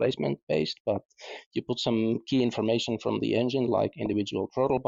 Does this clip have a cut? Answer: no; 0 cuts

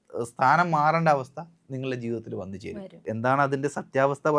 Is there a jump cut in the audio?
yes; 1 cut; at 3.0 s

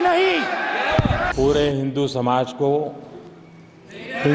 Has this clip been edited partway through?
yes; 1 cut; at 1.3 s

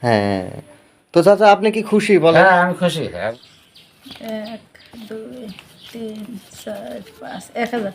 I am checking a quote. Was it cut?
yes; 1 cut; at 3.1 s

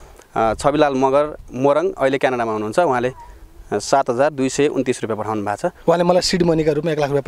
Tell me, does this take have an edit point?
yes; 1 cut; at 5.8 s

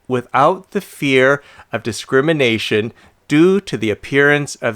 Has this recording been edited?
no; 0 cuts

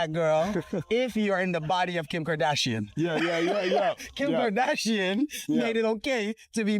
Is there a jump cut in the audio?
no; 0 cuts

